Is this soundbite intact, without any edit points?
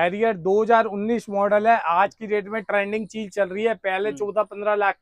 yes; 0 cuts

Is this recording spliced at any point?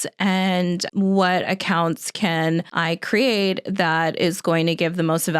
yes; 2 cuts; at 0.9 s, 2.7 s

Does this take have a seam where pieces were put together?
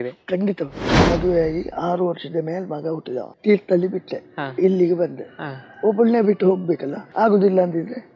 yes; 3 cuts; at 1.0 s, 3.3 s, 7.0 s

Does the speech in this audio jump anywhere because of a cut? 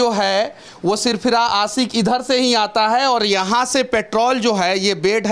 no; 0 cuts

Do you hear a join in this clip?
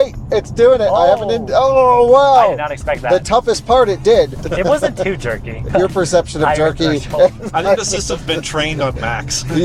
yes; 2 cuts; at 4.4 s, 5.6 s

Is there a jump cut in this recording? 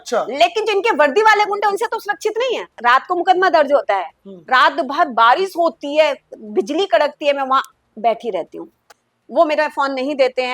yes; 2 cuts; at 2.8 s, 8.8 s

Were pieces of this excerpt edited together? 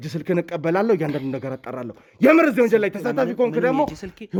no; 0 cuts

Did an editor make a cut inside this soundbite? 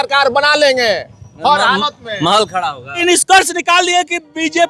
yes; 1 cut; at 3.0 s

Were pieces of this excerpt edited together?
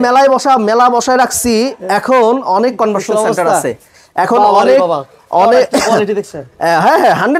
no; 0 cuts

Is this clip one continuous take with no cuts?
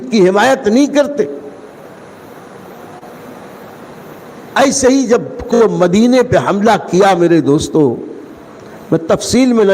no; 1 cut; at 5.6 s

